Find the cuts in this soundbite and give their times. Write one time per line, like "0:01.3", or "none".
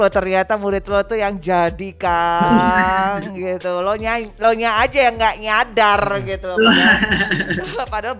none